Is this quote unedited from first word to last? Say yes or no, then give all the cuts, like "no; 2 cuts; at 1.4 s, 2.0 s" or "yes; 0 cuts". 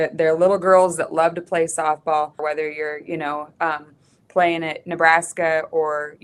no; 1 cut; at 2.4 s